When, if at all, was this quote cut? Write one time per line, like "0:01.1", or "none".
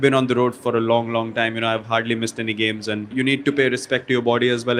0:03.1

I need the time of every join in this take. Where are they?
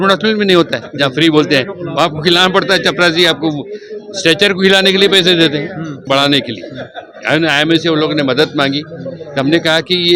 0:06.0

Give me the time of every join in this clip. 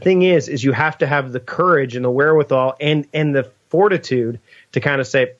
none

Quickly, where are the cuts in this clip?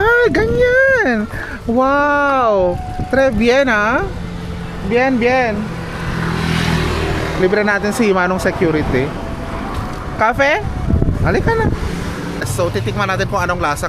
0:12.5

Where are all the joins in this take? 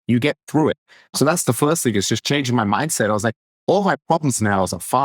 0:01.1

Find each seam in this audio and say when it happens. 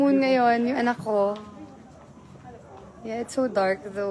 none

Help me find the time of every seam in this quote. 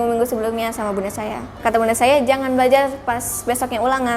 0:01.6

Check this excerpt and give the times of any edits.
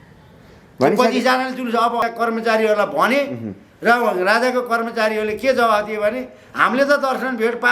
0:02.0

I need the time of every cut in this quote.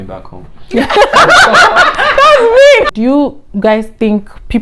0:02.9

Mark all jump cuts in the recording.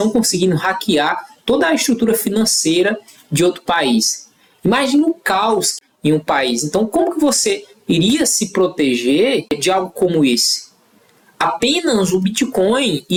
none

